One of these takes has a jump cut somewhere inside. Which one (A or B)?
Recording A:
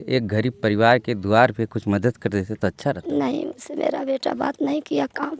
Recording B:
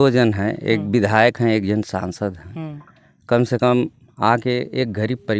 A